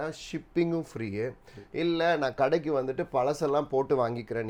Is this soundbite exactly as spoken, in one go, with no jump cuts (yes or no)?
yes